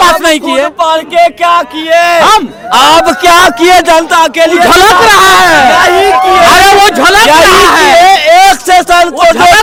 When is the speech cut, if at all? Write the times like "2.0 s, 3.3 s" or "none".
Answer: none